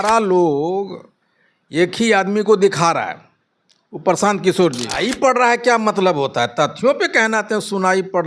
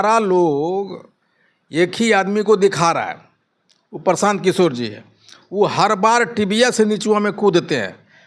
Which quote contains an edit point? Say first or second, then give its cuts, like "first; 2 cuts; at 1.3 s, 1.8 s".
first; 1 cut; at 5.0 s